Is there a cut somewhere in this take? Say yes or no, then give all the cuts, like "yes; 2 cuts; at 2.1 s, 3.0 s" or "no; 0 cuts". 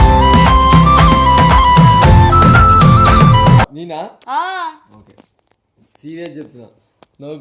no; 0 cuts